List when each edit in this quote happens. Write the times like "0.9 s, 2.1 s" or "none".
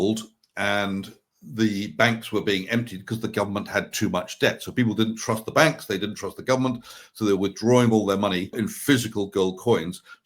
8.5 s